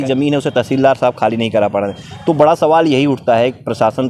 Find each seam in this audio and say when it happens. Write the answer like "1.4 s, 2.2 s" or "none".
none